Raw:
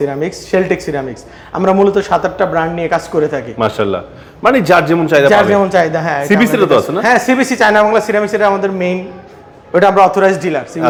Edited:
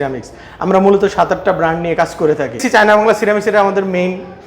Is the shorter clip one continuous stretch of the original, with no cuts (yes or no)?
no